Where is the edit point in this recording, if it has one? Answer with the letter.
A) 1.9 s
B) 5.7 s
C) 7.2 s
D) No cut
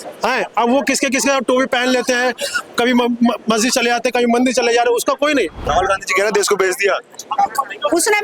B